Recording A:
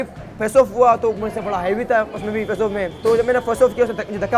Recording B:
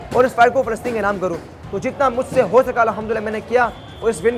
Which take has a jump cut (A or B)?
A